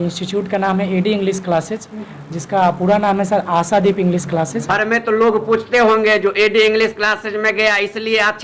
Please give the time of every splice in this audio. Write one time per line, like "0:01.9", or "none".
0:04.6